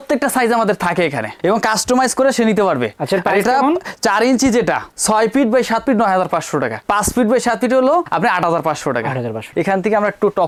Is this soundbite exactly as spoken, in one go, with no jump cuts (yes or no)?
yes